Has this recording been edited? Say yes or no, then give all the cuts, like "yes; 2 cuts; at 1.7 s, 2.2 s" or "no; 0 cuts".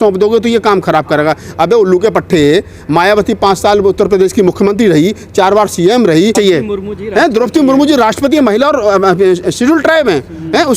yes; 1 cut; at 6.3 s